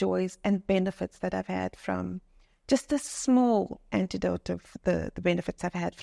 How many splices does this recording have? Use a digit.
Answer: 0